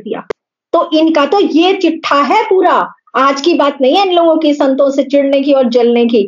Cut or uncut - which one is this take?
uncut